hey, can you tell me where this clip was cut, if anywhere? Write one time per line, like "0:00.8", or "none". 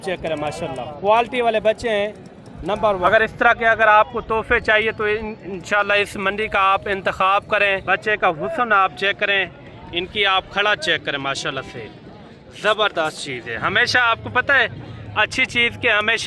0:03.1
0:07.8